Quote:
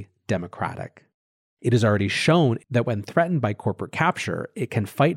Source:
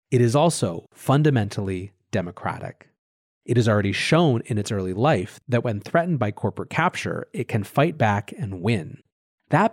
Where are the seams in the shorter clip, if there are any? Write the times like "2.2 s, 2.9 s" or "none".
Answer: 2.6 s